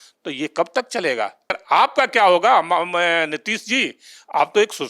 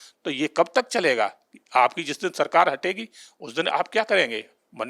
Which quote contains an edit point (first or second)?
first